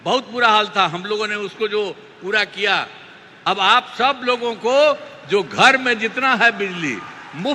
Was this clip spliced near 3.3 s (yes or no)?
yes